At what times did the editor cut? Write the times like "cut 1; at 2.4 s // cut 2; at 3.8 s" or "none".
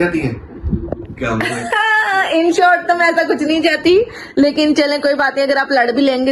none